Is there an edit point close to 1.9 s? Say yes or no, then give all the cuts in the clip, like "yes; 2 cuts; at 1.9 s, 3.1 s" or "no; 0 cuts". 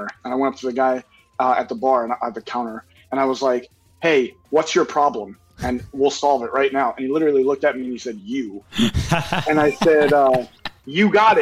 no; 0 cuts